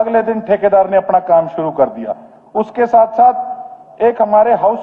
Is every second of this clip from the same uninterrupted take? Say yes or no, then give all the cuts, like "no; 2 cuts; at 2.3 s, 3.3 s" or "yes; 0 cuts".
yes; 0 cuts